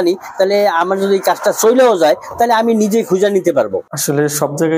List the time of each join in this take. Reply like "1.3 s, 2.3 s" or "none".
3.8 s